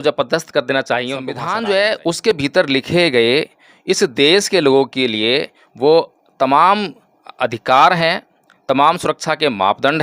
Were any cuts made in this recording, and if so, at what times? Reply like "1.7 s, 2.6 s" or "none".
1.4 s